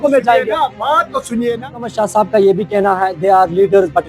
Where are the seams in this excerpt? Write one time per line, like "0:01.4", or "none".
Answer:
0:01.7